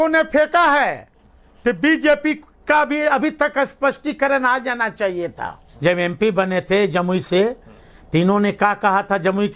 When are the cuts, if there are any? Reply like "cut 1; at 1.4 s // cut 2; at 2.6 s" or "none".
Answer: cut 1; at 5.6 s